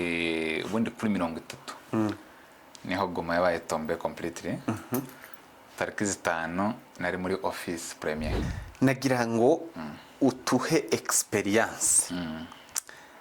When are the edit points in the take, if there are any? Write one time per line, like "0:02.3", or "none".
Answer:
0:08.4